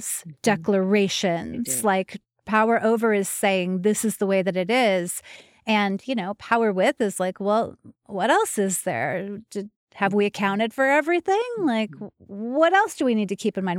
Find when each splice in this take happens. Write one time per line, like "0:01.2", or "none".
none